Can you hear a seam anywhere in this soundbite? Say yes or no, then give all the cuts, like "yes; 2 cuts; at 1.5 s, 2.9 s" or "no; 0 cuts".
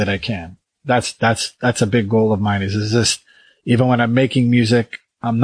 no; 0 cuts